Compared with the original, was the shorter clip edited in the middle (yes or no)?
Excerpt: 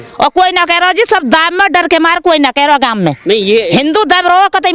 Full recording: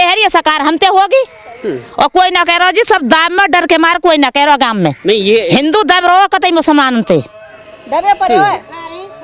no